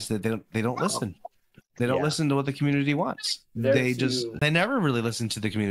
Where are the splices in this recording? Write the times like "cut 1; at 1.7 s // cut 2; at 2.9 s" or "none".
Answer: cut 1; at 4.4 s